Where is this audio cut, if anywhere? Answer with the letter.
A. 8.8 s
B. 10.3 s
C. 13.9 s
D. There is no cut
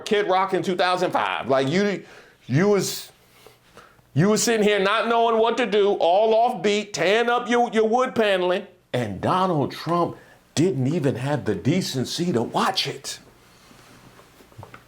A